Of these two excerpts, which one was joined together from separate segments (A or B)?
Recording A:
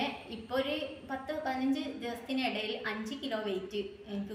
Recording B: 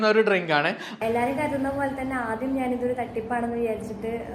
B